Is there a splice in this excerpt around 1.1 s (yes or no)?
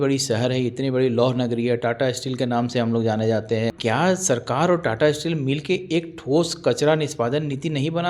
no